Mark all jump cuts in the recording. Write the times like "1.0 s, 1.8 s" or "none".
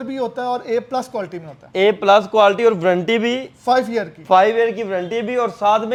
none